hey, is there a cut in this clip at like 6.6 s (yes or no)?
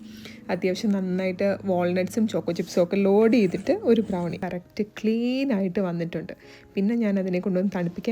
no